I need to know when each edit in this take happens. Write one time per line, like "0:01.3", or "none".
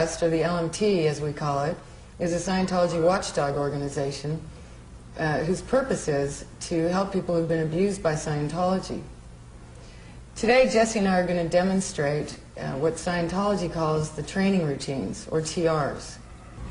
0:08.5